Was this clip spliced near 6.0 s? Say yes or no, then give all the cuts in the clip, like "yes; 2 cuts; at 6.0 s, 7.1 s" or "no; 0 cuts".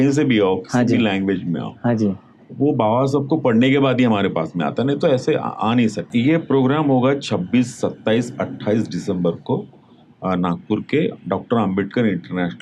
yes; 1 cut; at 6.0 s